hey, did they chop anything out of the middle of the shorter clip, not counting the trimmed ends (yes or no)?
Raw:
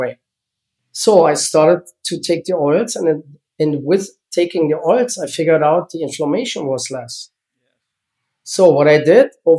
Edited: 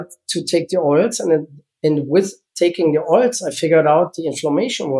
no